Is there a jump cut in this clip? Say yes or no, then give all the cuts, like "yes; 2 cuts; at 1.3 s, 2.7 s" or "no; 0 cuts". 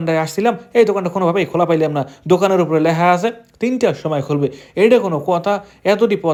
no; 0 cuts